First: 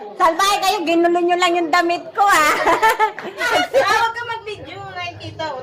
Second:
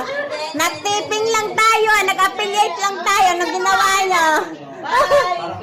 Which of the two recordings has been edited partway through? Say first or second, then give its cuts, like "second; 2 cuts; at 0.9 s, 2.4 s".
first; 1 cut; at 3.6 s